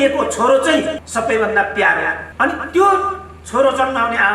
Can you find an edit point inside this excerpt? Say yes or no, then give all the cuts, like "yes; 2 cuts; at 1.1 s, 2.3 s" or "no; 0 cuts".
yes; 2 cuts; at 1.0 s, 2.2 s